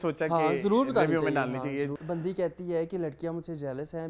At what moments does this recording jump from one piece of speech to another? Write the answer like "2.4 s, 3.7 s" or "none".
2.0 s

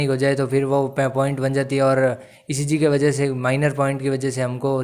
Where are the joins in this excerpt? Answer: none

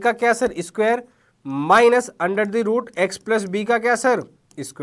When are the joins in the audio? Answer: none

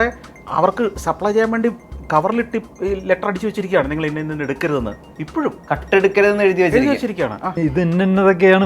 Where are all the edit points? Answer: 7.6 s

